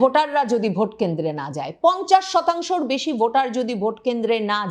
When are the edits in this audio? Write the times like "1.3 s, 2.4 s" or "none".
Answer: none